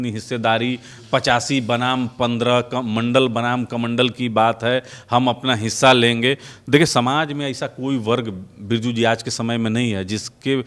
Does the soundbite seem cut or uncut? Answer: uncut